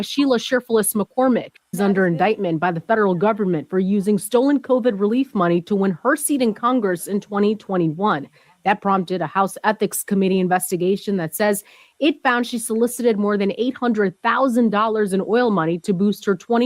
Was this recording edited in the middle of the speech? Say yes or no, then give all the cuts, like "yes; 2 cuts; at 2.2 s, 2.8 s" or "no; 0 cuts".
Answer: yes; 1 cut; at 1.8 s